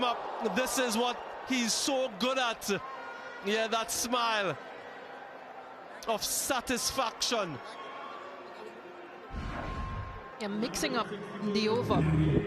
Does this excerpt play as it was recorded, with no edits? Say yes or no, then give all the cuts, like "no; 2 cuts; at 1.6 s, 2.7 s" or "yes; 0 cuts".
yes; 0 cuts